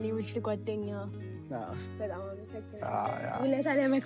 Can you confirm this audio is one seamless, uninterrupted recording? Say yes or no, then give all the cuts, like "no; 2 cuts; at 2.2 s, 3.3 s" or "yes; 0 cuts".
yes; 0 cuts